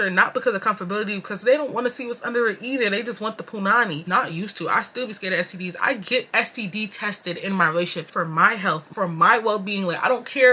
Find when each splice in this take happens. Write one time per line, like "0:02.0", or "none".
0:04.0
0:08.9